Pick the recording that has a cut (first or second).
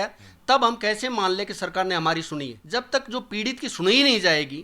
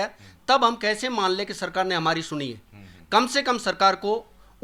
first